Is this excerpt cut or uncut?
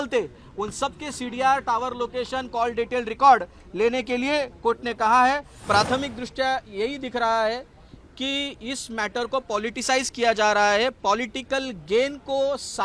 cut